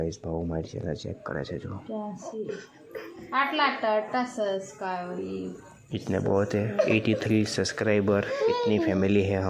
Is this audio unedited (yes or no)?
yes